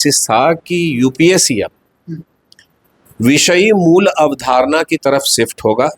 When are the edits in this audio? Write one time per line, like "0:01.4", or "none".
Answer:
none